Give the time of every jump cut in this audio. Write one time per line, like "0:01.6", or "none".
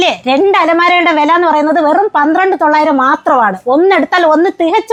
none